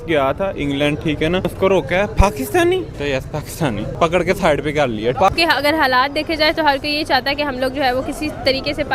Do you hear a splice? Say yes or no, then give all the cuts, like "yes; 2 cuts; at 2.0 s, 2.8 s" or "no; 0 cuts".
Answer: yes; 4 cuts; at 1.5 s, 2.9 s, 3.9 s, 5.2 s